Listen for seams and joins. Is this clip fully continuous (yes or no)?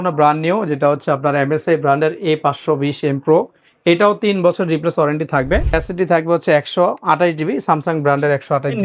no